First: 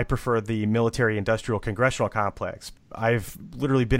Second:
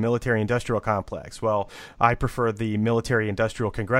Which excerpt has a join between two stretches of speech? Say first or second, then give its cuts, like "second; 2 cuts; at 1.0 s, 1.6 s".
first; 1 cut; at 2.9 s